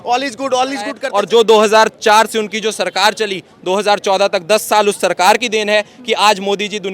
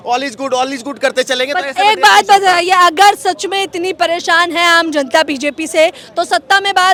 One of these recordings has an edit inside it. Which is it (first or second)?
first